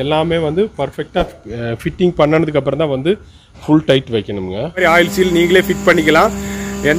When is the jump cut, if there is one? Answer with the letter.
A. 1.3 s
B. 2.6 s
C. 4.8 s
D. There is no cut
C